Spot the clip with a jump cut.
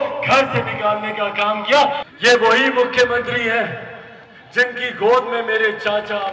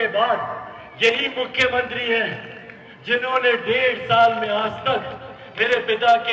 first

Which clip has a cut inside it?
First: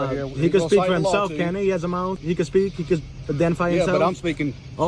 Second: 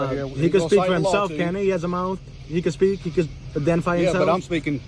first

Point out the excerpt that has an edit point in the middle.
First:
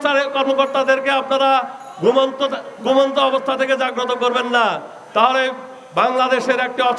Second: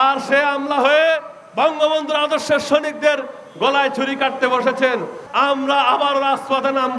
second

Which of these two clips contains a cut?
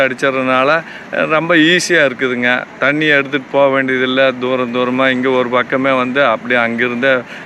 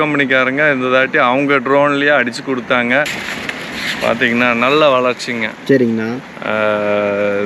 second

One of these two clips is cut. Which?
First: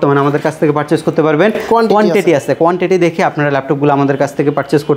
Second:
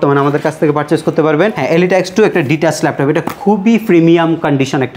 second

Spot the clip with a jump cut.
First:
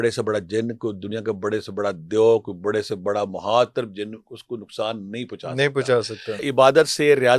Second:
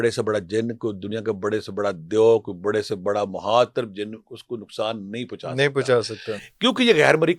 first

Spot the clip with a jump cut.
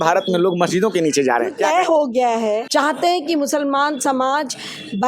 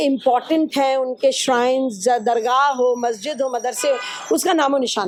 first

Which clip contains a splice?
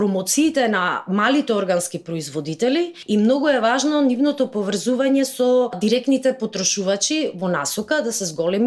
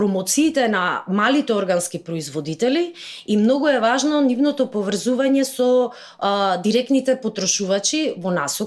first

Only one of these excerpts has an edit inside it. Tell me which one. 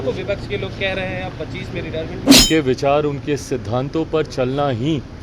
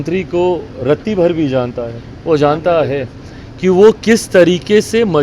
first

